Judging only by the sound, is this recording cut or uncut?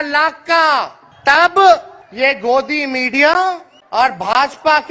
cut